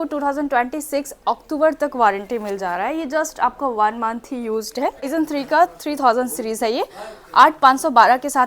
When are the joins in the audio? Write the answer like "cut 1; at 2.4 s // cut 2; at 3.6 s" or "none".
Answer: cut 1; at 5.1 s